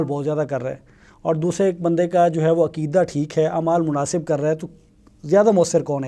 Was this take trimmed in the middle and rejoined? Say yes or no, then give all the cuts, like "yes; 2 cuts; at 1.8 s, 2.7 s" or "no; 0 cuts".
no; 0 cuts